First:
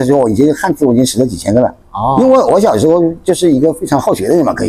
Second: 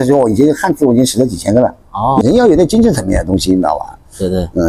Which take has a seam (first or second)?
second